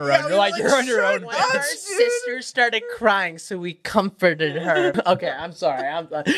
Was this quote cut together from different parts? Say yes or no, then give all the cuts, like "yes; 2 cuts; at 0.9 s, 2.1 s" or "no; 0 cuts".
yes; 1 cut; at 4.9 s